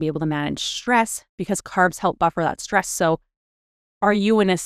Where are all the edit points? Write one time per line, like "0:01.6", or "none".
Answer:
none